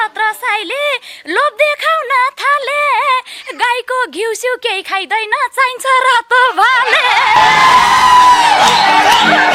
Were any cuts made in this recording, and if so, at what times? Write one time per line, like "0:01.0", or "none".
none